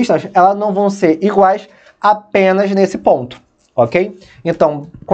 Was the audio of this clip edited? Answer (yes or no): no